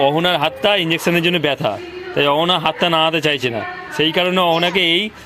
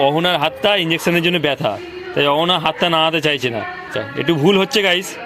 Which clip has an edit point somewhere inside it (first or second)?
second